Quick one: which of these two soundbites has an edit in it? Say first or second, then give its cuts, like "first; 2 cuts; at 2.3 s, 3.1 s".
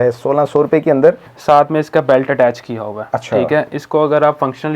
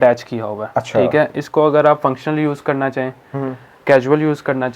first; 1 cut; at 1.3 s